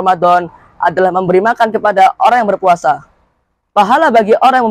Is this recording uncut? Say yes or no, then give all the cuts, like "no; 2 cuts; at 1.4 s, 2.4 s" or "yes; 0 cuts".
yes; 0 cuts